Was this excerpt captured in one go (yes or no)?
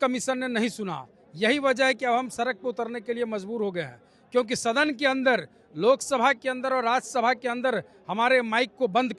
yes